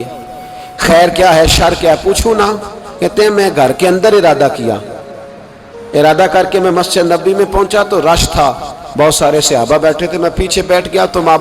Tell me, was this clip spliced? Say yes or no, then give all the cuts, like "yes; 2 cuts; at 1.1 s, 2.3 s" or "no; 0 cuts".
no; 0 cuts